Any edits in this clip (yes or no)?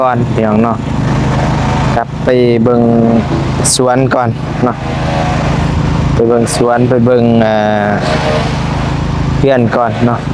no